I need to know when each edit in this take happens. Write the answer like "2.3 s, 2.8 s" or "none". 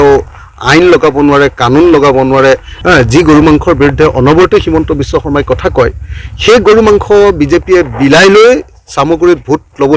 2.7 s